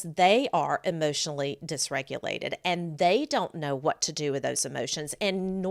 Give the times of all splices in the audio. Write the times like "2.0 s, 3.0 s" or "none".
none